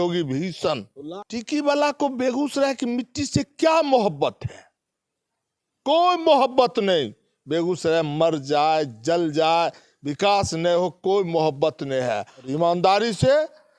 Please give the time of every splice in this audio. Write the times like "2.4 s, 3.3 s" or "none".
1.0 s, 12.5 s